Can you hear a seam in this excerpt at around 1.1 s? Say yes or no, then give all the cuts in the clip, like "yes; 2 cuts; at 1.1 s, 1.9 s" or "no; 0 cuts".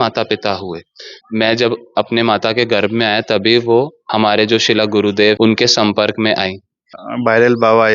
yes; 4 cuts; at 1.1 s, 4.0 s, 5.4 s, 7.0 s